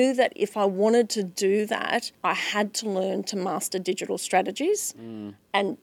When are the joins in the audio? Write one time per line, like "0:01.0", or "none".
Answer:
0:02.1